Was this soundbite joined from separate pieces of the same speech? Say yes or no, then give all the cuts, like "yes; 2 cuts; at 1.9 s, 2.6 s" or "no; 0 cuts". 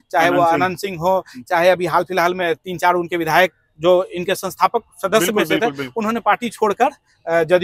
no; 0 cuts